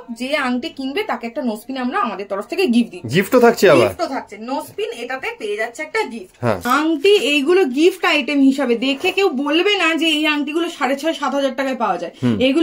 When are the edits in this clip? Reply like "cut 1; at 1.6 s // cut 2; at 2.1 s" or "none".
cut 1; at 6.6 s